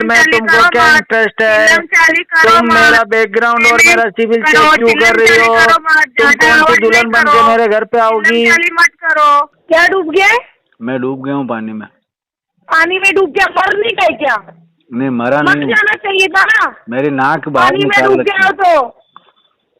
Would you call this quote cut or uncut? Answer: cut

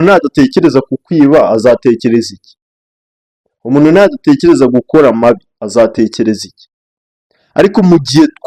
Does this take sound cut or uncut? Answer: uncut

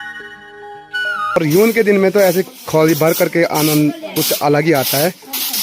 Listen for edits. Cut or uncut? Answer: cut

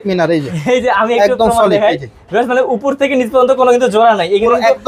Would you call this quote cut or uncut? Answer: uncut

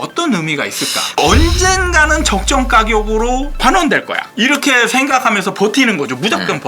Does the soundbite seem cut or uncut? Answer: cut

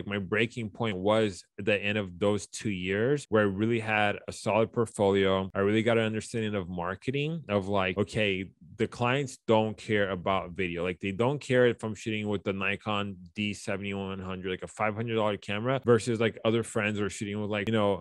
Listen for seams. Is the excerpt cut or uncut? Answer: uncut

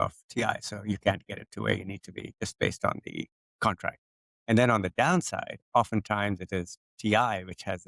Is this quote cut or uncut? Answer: uncut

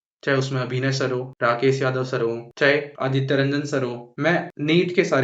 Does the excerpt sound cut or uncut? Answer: uncut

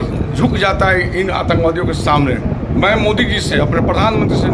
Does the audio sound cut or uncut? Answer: uncut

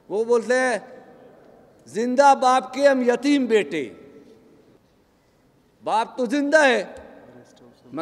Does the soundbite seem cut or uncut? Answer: cut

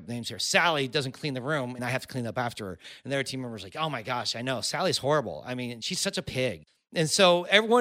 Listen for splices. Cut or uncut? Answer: cut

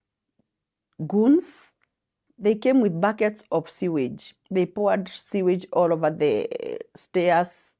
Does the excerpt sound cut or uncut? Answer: cut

